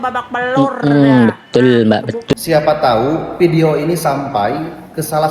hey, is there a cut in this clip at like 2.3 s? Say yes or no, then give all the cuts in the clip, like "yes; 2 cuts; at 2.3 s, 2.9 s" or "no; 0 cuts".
yes; 1 cut; at 2.3 s